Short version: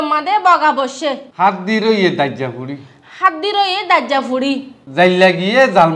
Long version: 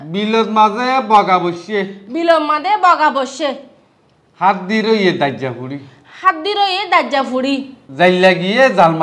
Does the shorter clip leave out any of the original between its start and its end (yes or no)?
yes